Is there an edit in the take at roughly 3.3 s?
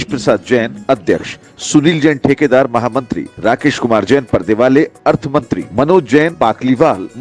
no; 0 cuts

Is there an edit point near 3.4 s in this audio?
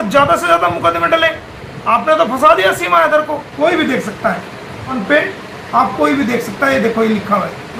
yes; 1 cut; at 3.4 s

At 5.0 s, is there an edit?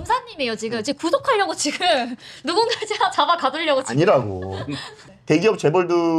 yes; 1 cut; at 5.0 s

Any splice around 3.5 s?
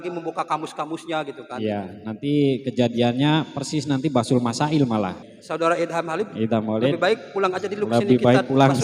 no; 1 cut; at 5.3 s

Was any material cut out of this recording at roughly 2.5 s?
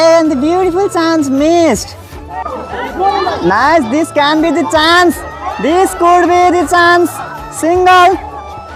yes; 1 cut; at 2.5 s

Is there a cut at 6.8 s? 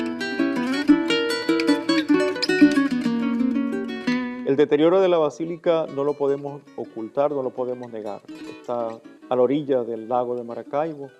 no; 1 cut; at 9.6 s

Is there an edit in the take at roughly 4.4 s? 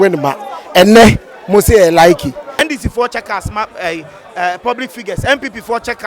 no; 1 cut; at 2.6 s

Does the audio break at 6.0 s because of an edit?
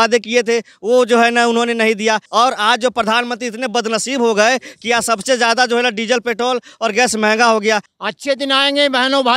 no; 2 cuts; at 2.2 s, 7.9 s

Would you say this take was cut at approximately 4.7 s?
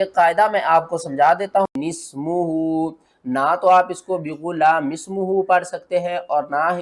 no; 1 cut; at 1.7 s

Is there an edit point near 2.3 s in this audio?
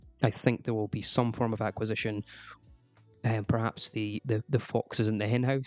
no; 0 cuts

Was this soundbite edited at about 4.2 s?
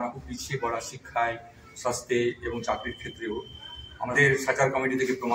yes; 1 cut; at 4.2 s

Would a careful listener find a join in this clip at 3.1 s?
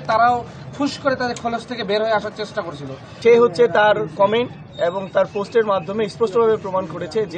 yes; 1 cut; at 3.1 s

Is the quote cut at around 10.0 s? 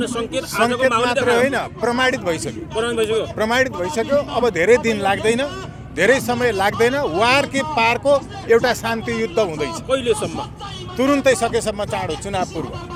no; 0 cuts

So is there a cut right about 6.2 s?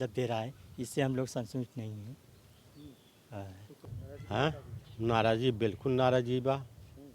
no; 1 cut; at 3.8 s

